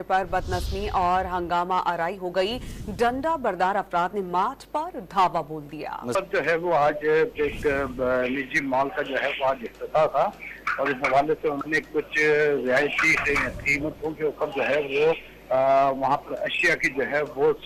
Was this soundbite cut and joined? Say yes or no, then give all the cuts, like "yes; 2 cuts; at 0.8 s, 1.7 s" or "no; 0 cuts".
no; 0 cuts